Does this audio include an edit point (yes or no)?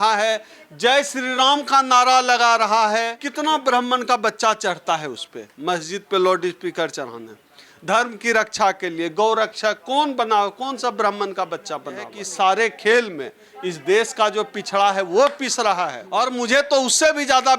yes